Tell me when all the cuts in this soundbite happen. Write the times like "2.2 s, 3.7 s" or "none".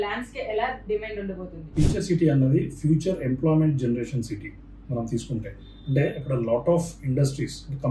none